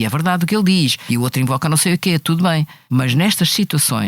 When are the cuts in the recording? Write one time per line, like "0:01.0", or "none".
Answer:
0:01.0
0:02.8